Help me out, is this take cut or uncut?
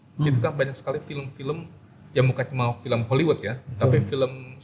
uncut